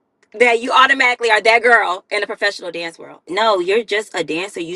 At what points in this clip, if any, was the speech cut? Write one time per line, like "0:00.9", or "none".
0:03.3